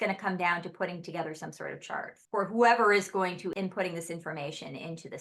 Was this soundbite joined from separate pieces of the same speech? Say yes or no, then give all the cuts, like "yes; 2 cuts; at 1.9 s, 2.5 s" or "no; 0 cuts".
yes; 2 cuts; at 2.2 s, 3.5 s